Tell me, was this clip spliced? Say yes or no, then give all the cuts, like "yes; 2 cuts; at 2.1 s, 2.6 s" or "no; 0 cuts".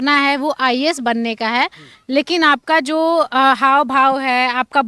no; 0 cuts